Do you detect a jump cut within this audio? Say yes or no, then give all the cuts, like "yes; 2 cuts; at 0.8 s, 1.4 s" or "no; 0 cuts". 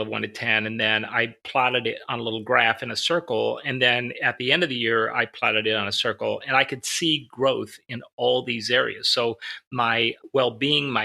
yes; 2 cuts; at 1.4 s, 10.2 s